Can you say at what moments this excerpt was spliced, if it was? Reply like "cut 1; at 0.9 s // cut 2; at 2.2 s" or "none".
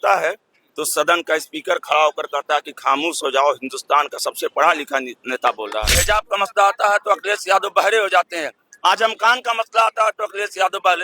cut 1; at 5.9 s